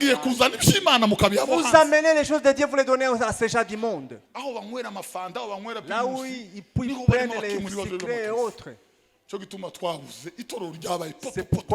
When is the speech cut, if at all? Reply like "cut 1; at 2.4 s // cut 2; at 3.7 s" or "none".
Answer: cut 1; at 4.3 s

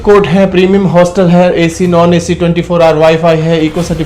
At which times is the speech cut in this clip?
none

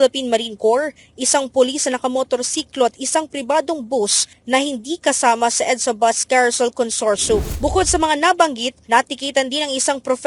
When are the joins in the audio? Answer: cut 1; at 7.5 s

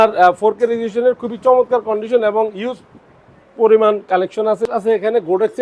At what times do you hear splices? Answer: cut 1; at 4.7 s

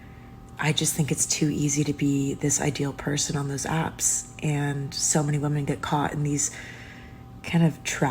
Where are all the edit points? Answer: none

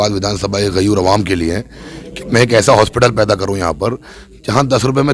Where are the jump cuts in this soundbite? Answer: none

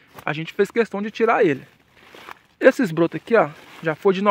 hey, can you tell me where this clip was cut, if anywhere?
none

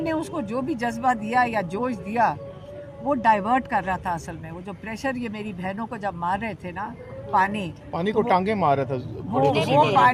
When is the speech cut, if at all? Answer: none

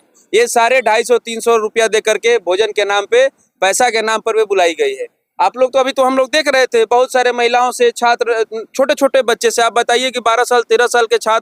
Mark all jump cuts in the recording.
none

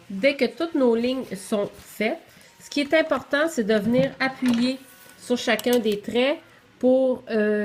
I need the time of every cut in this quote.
none

